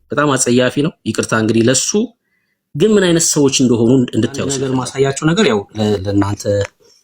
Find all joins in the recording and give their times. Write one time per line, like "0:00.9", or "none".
0:04.6